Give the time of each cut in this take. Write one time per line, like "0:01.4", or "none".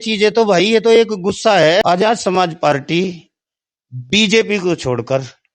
0:01.8